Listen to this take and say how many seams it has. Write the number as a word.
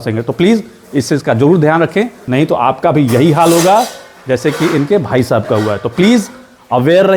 one